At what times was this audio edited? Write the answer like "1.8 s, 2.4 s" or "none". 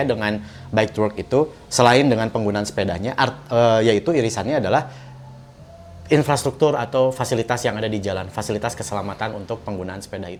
none